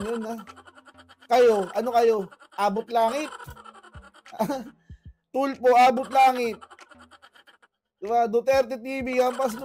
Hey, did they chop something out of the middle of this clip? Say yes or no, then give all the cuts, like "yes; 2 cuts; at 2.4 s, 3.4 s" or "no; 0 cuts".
no; 0 cuts